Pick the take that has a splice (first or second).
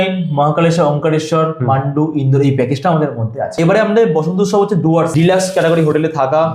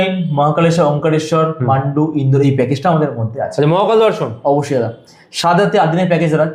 first